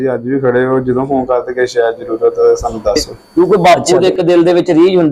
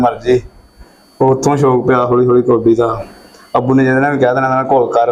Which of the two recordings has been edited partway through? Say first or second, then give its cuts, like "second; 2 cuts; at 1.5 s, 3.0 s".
first; 1 cut; at 3.1 s